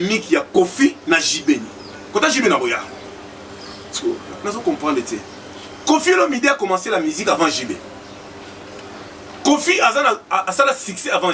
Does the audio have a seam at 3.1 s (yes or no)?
yes